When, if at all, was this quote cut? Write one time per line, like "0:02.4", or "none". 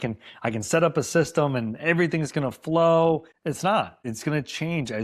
0:03.3
0:04.0